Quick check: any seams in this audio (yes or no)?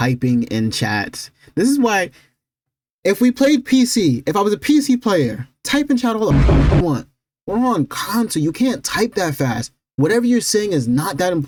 no